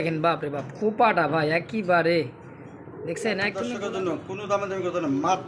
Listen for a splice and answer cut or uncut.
cut